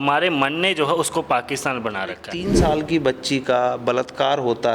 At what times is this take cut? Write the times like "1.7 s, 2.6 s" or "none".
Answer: 2.3 s